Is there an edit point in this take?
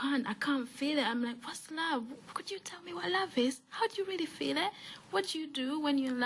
yes; 1 cut; at 2.3 s

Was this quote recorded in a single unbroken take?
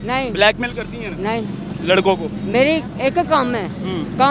yes; 0 cuts

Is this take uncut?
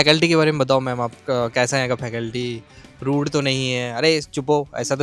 yes; 0 cuts

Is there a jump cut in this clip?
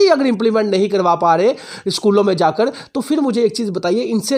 no; 0 cuts

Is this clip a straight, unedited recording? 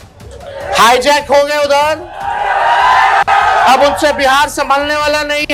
yes; 0 cuts

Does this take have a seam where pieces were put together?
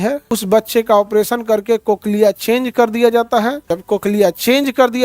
yes; 1 cut; at 3.7 s

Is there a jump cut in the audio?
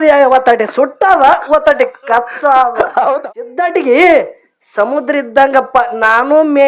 yes; 1 cut; at 3.2 s

